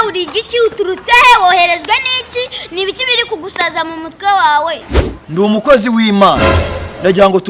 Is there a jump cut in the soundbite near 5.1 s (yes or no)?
no